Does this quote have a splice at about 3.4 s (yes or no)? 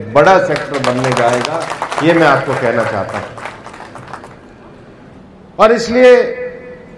no